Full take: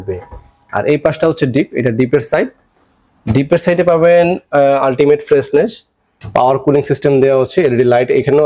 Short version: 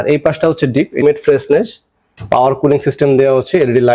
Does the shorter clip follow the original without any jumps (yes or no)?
no